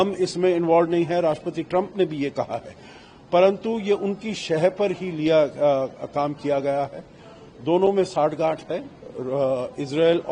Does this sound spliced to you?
no; 0 cuts

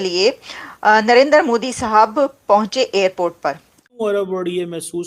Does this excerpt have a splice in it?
yes; 1 cut; at 3.7 s

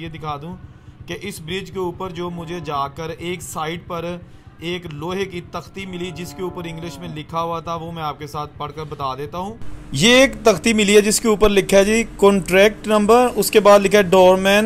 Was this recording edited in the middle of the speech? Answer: no; 0 cuts

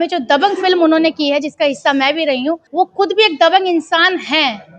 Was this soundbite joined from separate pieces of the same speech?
yes; 1 cut; at 2.6 s

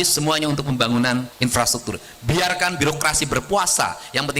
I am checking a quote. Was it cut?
yes; 1 cut; at 1.3 s

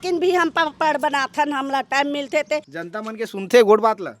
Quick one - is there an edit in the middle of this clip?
yes; 1 cut; at 2.7 s

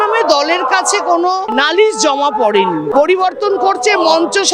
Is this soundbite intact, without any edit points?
no; 2 cuts; at 1.5 s, 2.9 s

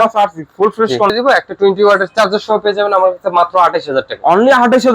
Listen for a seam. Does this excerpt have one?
yes; 1 cut; at 1.1 s

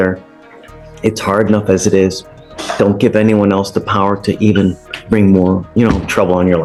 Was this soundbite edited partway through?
no; 0 cuts

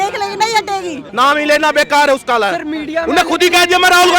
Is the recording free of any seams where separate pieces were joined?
no; 1 cut; at 1.0 s

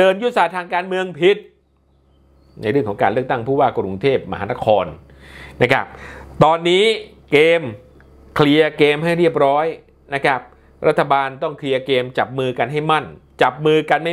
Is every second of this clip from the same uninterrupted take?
yes; 0 cuts

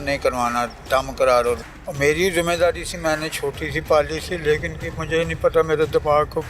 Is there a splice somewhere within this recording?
yes; 1 cut; at 1.7 s

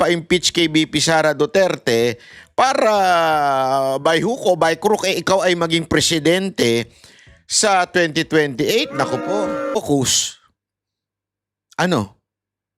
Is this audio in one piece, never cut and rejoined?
no; 1 cut; at 9.8 s

